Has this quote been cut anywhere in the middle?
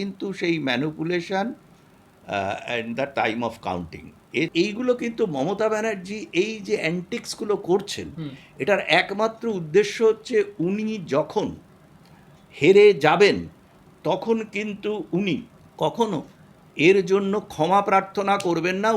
yes; 2 cuts; at 4.5 s, 15.6 s

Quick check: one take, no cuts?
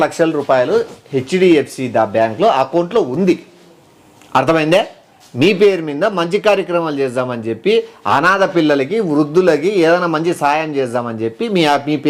yes; 0 cuts

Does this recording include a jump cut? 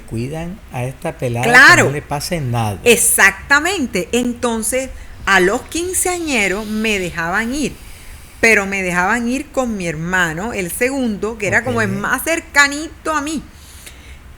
no; 0 cuts

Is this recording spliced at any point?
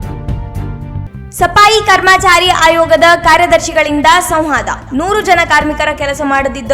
yes; 1 cut; at 1.0 s

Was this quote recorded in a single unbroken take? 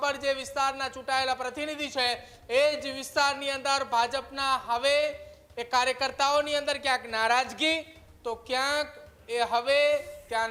yes; 0 cuts

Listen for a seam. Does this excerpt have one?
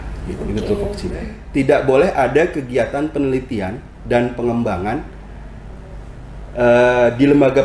yes; 1 cut; at 1.4 s

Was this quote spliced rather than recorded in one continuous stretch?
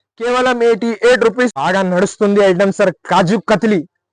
yes; 1 cut; at 1.5 s

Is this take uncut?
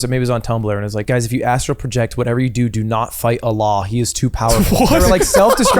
no; 2 cuts; at 1.0 s, 4.6 s

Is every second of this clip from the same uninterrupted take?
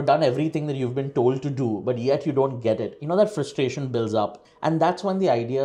yes; 0 cuts

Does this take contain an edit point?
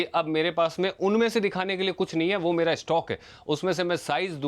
no; 0 cuts

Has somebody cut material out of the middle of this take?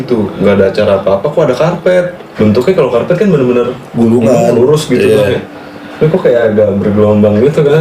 yes; 1 cut; at 2.2 s

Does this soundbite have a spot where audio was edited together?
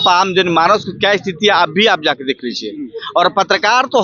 no; 0 cuts

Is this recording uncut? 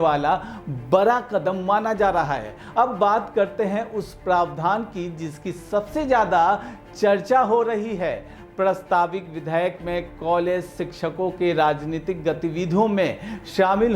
yes; 0 cuts

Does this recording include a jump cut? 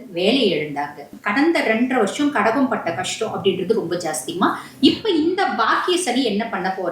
yes; 1 cut; at 1.1 s

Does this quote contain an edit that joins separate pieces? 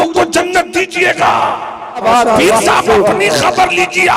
yes; 1 cut; at 2.0 s

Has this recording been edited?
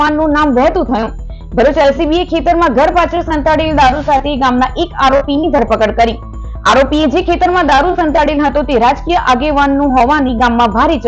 no; 0 cuts

